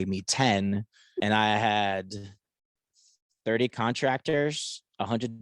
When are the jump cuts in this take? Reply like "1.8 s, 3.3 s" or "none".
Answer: 1.0 s